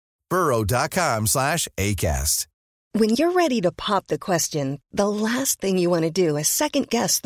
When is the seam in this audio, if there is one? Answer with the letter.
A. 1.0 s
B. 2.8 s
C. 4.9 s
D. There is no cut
B